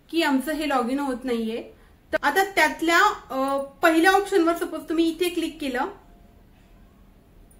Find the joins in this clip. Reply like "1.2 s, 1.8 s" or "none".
2.2 s